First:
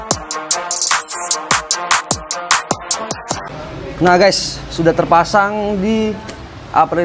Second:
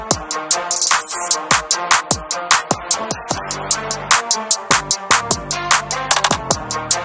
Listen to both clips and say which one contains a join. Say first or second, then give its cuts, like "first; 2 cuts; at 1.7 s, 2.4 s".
first; 1 cut; at 3.5 s